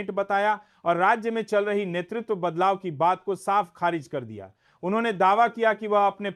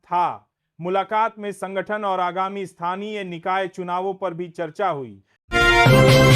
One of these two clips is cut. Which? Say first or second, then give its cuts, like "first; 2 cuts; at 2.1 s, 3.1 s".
second; 1 cut; at 5.4 s